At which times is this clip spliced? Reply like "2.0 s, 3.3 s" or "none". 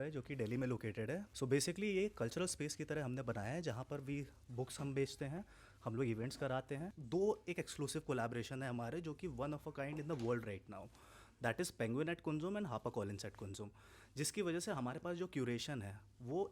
1.3 s, 6.9 s